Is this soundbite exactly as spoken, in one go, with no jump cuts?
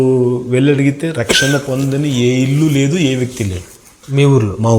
yes; 0 cuts

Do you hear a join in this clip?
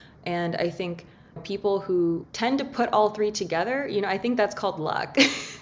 yes; 1 cut; at 2.3 s

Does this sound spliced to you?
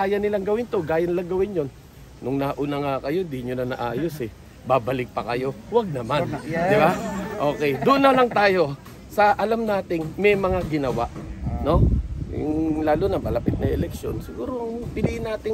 no; 0 cuts

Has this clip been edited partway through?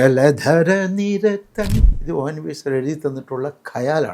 yes; 1 cut; at 1.9 s

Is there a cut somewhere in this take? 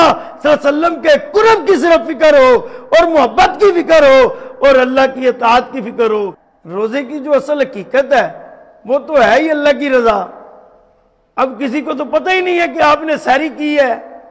yes; 1 cut; at 6.4 s

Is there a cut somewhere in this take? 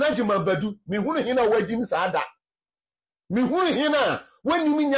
no; 0 cuts

